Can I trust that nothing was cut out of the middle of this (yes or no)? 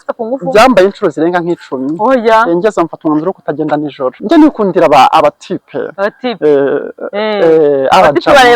no